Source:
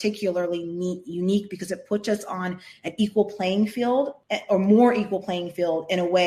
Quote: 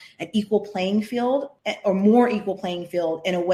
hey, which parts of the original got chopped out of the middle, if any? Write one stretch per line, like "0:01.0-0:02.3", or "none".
none